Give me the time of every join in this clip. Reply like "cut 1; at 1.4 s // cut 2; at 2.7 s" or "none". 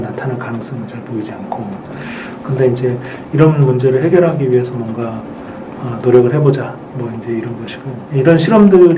cut 1; at 8.0 s